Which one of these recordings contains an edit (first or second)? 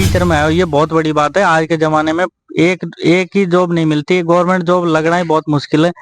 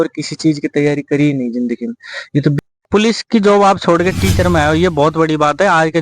second